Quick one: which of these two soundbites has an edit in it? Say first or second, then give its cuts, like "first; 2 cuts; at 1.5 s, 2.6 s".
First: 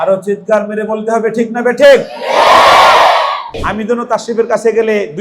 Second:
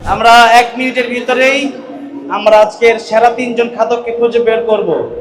first; 1 cut; at 3.5 s